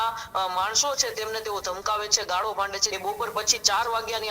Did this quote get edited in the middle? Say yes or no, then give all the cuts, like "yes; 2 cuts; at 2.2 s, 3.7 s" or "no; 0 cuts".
yes; 1 cut; at 2.8 s